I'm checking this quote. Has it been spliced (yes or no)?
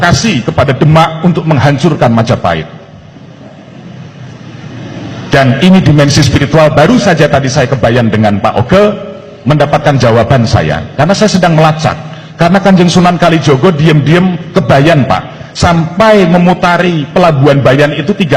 no